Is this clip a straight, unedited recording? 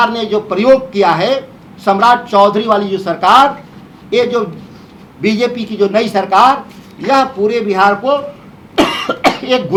yes; 0 cuts

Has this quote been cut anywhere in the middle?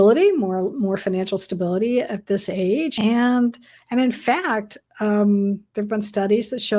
yes; 1 cut; at 2.9 s

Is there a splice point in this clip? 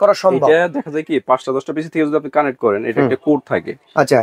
no; 0 cuts

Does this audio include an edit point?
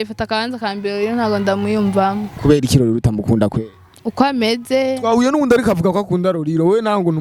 no; 0 cuts

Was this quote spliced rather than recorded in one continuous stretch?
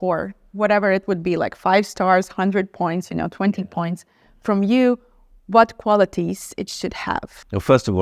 no; 0 cuts

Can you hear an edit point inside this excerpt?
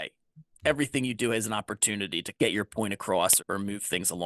yes; 2 cuts; at 2.2 s, 3.4 s

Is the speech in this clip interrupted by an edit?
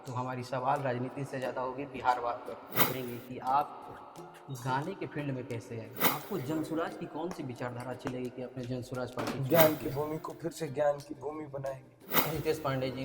yes; 4 cuts; at 2.9 s, 6.0 s, 9.4 s, 12.2 s

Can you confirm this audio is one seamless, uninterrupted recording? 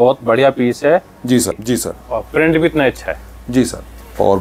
no; 1 cut; at 1.6 s

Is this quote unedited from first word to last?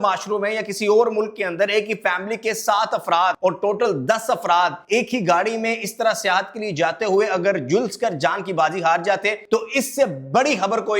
no; 3 cuts; at 3.4 s, 4.8 s, 9.4 s

